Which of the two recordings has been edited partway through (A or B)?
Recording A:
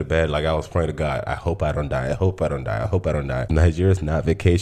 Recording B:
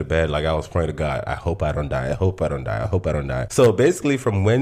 A